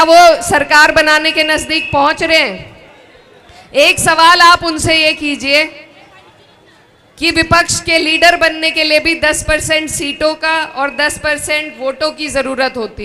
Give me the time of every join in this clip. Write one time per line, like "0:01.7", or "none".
none